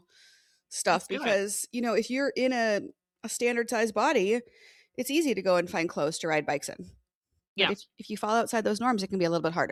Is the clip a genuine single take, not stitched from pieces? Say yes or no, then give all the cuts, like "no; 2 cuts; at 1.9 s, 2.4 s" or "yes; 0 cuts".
yes; 0 cuts